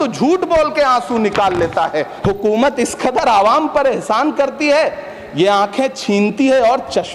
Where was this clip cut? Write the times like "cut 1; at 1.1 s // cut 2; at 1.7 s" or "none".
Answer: cut 1; at 2.0 s